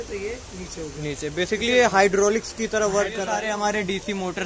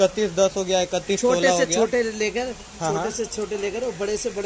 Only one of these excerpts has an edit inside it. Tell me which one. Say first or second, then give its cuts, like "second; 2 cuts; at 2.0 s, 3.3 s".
first; 1 cut; at 3.2 s